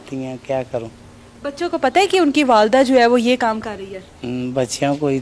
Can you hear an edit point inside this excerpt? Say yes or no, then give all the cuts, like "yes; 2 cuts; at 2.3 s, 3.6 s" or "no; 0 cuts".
no; 0 cuts